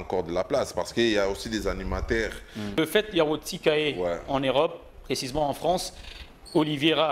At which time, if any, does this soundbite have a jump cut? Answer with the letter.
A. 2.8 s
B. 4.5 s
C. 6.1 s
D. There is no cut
A